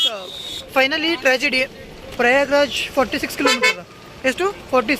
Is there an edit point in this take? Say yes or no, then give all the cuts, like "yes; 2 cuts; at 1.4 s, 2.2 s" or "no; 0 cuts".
yes; 1 cut; at 2.0 s